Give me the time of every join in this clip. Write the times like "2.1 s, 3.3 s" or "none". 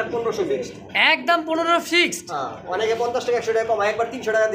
none